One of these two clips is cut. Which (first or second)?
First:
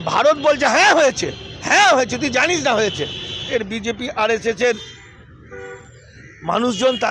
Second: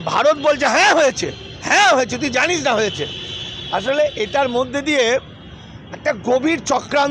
first